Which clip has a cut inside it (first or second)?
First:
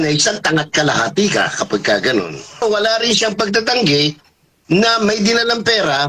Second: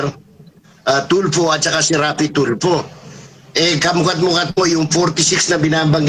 first